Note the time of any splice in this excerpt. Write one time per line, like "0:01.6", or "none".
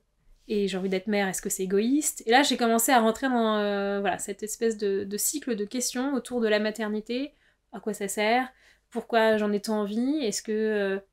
none